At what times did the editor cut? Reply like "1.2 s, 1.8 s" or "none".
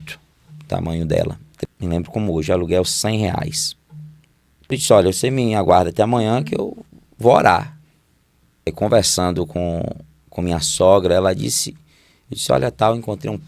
1.5 s, 4.8 s, 8.7 s